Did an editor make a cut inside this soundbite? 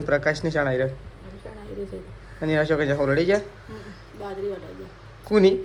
no; 0 cuts

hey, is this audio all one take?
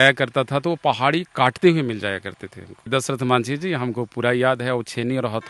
yes; 0 cuts

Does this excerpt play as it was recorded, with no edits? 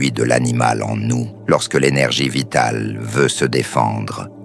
no; 1 cut; at 1.3 s

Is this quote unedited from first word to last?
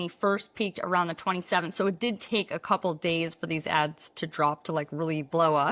yes; 0 cuts

